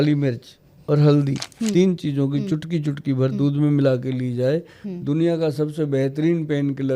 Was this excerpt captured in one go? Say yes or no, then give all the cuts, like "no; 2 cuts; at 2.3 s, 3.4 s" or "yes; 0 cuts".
yes; 0 cuts